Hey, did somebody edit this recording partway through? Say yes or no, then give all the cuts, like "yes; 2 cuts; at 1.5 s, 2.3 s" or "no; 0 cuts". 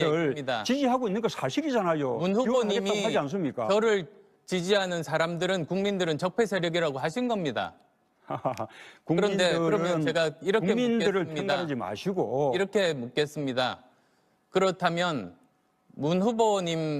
no; 0 cuts